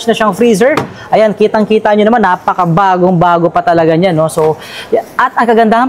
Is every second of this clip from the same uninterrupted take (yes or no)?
yes